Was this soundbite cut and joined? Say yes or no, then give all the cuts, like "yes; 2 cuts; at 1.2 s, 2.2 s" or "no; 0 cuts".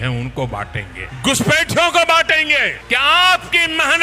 yes; 2 cuts; at 1.0 s, 2.8 s